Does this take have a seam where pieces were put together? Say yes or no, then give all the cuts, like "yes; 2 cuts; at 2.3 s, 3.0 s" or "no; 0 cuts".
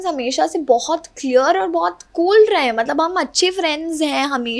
no; 0 cuts